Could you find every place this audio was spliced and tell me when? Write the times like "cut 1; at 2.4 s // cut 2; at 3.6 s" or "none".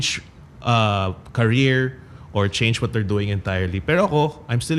none